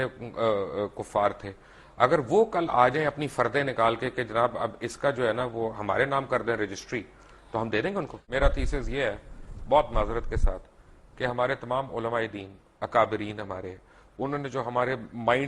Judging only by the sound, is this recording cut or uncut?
cut